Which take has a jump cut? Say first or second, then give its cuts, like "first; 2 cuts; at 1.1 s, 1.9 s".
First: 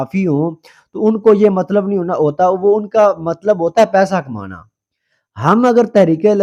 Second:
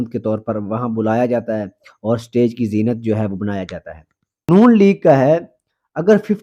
second; 1 cut; at 4.5 s